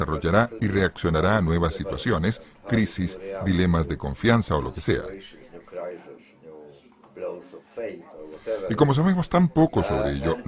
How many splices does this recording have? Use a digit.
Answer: 1